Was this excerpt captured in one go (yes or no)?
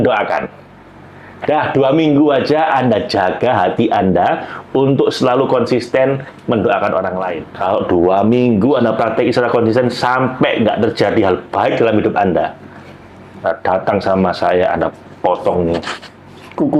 no